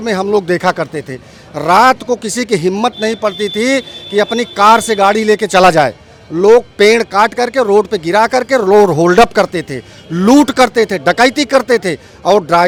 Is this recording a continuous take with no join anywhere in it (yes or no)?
yes